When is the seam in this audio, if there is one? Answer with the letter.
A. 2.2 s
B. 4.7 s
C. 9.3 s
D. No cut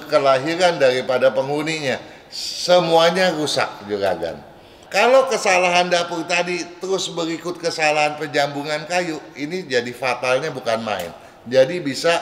B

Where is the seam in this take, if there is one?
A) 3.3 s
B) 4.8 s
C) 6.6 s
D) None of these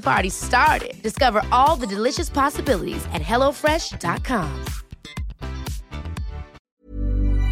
C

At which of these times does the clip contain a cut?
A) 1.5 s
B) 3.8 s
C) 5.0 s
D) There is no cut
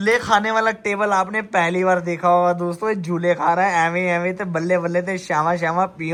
D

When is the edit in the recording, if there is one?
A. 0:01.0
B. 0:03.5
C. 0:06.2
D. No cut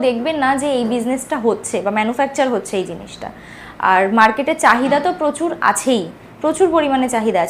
D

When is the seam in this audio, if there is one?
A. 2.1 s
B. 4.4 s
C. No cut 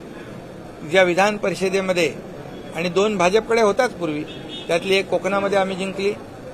C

